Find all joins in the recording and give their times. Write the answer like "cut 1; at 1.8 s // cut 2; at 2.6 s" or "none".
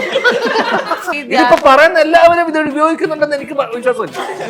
cut 1; at 1.1 s

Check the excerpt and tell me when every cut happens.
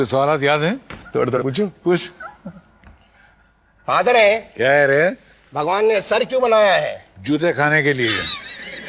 cut 1; at 1.4 s

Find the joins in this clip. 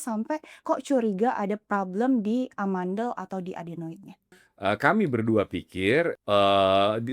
cut 1; at 4.4 s // cut 2; at 6.2 s

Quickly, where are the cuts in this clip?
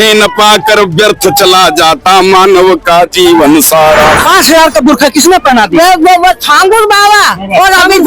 cut 1; at 4.2 s

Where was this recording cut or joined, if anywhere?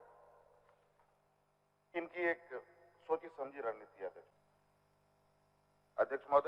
cut 1; at 1.9 s // cut 2; at 4.3 s

